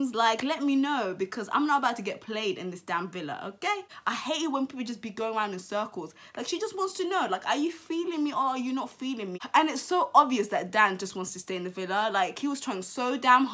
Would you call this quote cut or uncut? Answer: uncut